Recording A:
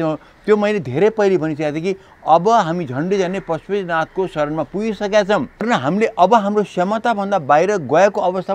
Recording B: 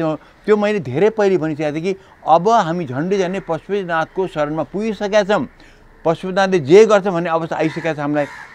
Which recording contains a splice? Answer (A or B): A